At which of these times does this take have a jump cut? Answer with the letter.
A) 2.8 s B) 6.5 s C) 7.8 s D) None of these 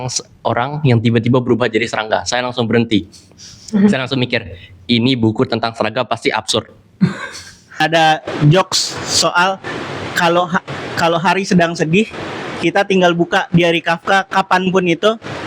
C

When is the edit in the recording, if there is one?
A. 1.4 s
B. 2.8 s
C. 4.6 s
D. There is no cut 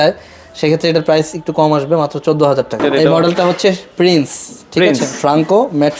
B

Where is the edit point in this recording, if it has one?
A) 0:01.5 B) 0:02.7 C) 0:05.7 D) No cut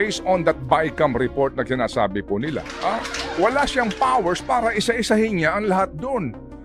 B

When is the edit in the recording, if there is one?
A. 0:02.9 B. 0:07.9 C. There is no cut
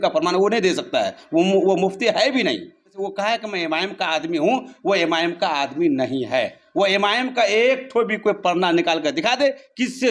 A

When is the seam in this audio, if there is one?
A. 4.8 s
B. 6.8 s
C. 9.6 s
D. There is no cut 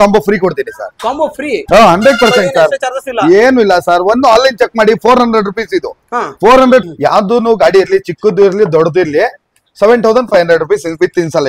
B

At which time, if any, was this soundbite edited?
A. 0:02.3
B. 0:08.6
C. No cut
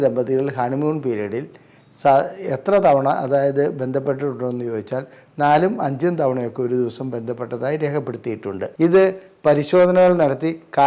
B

